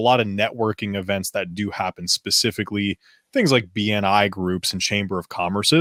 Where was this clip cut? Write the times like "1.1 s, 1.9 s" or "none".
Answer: none